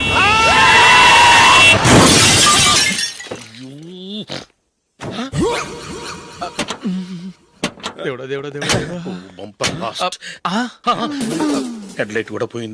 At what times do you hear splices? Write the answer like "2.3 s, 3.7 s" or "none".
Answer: none